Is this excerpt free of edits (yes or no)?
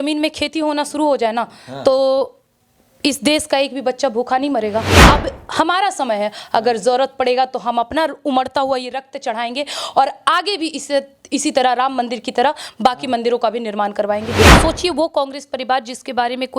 no